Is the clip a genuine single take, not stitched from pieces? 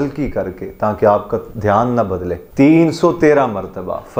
no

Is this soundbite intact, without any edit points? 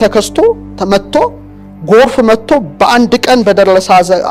yes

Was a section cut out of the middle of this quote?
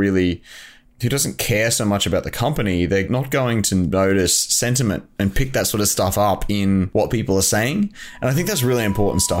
yes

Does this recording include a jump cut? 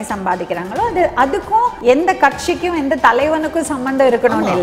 yes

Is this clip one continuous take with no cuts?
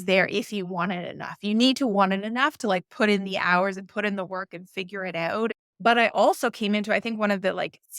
no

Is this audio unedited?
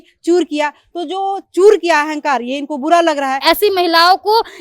no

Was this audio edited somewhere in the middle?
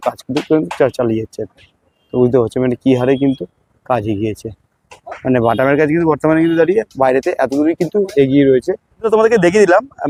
no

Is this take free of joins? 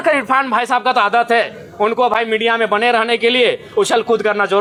yes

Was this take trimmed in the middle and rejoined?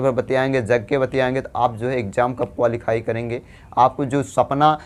no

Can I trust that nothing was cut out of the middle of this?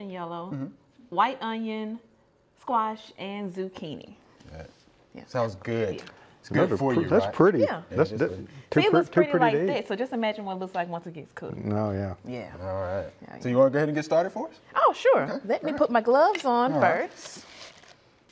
no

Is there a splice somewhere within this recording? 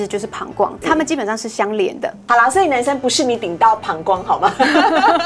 yes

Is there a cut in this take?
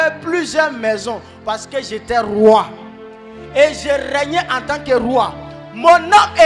no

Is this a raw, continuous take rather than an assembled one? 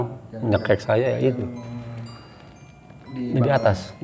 yes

